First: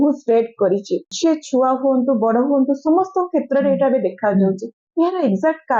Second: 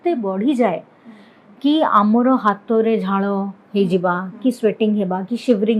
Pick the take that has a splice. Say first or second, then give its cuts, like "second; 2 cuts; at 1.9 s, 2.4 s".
first; 1 cut; at 1.1 s